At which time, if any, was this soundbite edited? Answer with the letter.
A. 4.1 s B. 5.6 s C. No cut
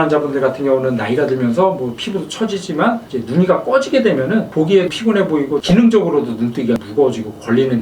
B